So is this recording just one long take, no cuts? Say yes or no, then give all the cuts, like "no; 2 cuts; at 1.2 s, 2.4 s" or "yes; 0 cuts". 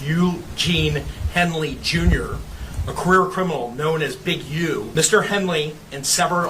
no; 1 cut; at 4.9 s